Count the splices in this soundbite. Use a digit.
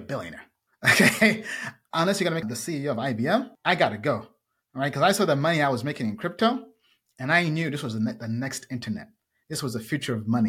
2